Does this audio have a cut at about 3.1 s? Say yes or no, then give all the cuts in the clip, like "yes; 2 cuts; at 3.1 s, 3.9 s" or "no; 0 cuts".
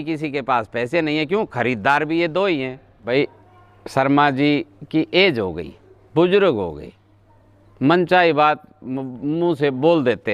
yes; 1 cut; at 3.1 s